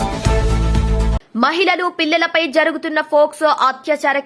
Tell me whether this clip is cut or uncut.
uncut